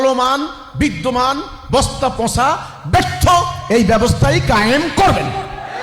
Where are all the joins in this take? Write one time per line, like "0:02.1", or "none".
none